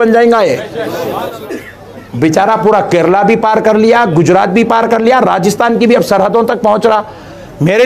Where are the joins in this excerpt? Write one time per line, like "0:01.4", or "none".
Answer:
0:01.4